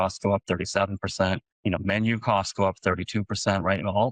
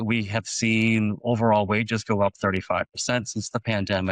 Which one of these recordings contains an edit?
first; 1 cut; at 1.5 s

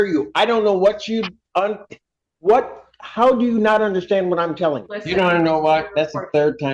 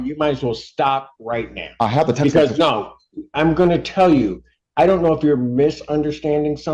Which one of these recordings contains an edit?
first; 1 cut; at 4.9 s

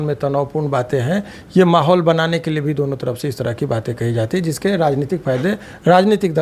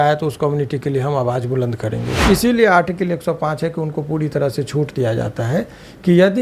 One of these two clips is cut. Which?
second; 1 cut; at 2.1 s

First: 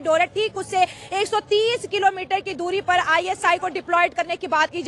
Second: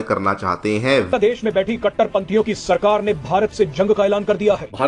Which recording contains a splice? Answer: second; 1 cut; at 1.1 s

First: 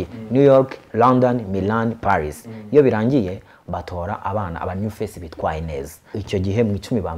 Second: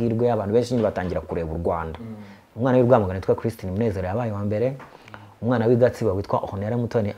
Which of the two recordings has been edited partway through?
first; 1 cut; at 6.0 s

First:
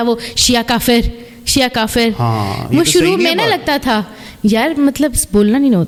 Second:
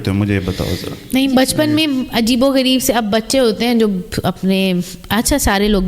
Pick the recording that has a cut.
second; 1 cut; at 1.0 s

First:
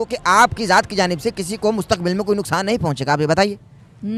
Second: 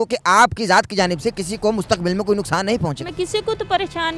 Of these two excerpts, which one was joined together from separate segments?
second; 1 cut; at 3.0 s

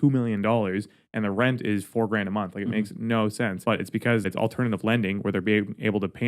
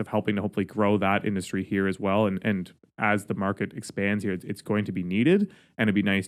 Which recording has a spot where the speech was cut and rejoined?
first; 1 cut; at 4.0 s

